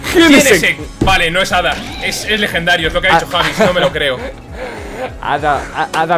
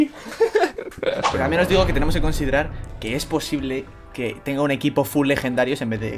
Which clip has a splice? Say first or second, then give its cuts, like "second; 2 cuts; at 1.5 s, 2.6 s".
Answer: second; 1 cut; at 1.3 s